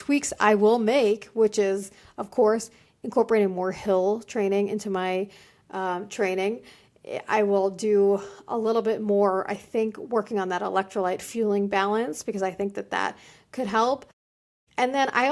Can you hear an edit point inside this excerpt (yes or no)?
no